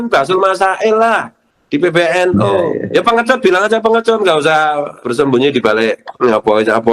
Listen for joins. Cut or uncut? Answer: cut